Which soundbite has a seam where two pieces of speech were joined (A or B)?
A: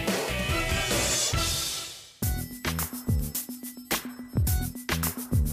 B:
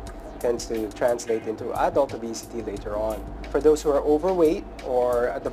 B